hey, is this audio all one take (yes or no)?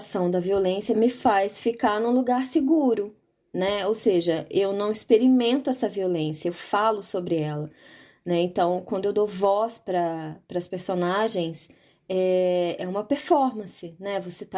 no